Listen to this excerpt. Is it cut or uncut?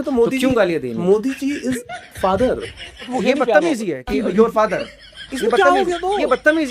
cut